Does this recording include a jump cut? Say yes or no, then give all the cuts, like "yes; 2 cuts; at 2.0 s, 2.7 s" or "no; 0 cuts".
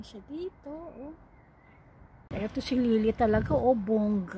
yes; 1 cut; at 2.3 s